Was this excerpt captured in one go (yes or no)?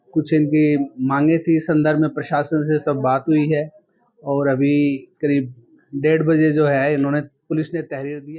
yes